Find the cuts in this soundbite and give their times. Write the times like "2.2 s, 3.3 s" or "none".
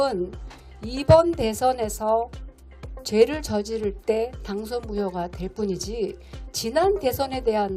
none